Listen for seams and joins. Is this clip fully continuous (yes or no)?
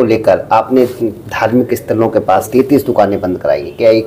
no